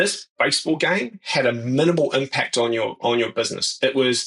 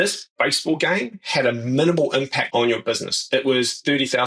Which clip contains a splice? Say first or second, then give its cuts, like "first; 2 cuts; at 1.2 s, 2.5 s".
second; 1 cut; at 2.5 s